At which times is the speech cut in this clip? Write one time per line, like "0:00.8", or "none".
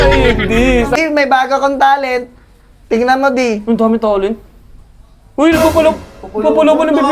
0:01.0

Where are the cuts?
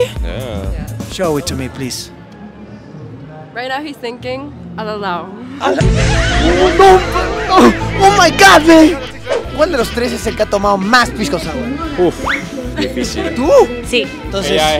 0:09.4

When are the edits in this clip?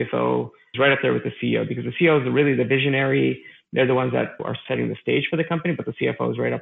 none

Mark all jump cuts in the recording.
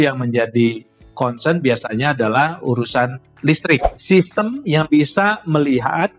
0:03.9

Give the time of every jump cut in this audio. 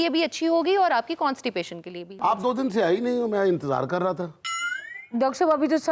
0:02.0

